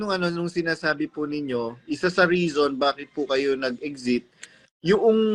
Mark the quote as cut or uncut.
uncut